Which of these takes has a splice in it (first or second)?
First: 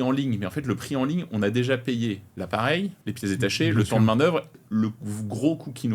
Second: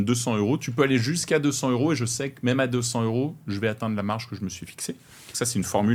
first